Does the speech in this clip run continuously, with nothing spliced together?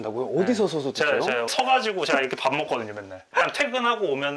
no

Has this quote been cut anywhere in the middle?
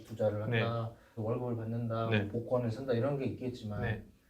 yes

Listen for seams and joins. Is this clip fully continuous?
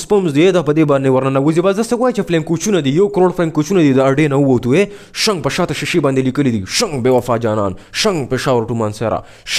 yes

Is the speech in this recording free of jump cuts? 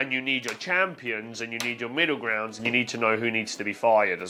yes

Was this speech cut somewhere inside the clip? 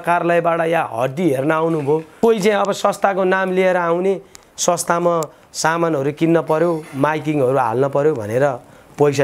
yes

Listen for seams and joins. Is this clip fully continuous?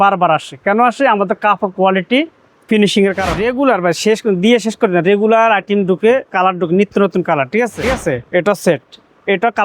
no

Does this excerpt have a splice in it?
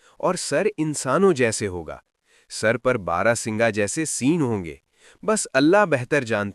no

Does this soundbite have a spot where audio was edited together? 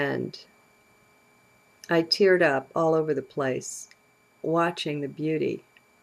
yes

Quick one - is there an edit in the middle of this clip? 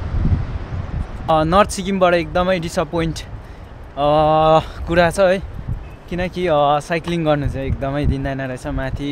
yes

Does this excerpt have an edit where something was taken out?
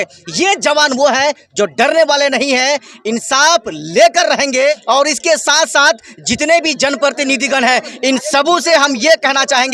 yes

